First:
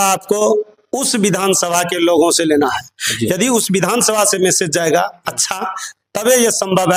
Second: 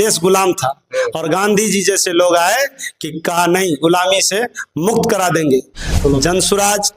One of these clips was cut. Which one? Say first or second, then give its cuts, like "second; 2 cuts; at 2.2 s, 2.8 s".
second; 1 cut; at 6.0 s